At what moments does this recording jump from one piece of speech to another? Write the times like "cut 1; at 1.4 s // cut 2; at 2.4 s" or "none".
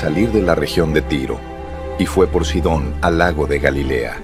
none